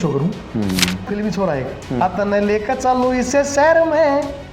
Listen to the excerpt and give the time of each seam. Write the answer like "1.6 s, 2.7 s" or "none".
1.1 s